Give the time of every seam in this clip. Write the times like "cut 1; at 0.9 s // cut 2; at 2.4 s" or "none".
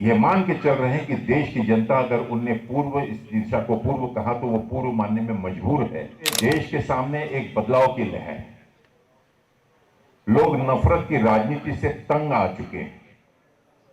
cut 1; at 6.4 s